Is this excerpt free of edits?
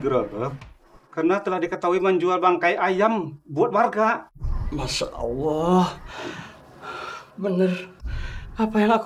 yes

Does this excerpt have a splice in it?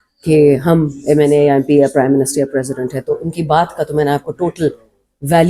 no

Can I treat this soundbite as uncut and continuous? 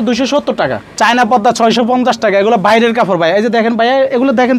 no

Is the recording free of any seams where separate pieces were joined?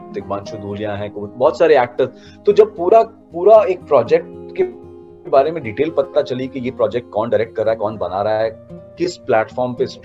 yes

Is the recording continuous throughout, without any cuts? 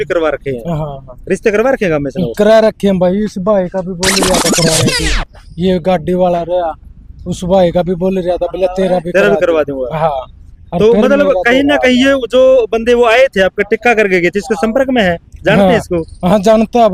yes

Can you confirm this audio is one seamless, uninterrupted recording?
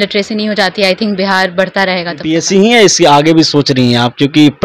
no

